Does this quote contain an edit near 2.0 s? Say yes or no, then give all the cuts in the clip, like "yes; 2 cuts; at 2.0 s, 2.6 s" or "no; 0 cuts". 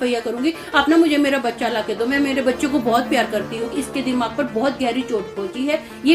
no; 1 cut; at 3.8 s